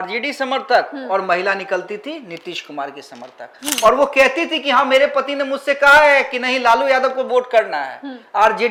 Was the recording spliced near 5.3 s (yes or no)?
no